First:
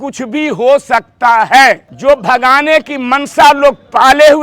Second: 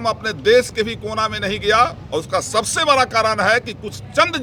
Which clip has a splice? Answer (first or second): first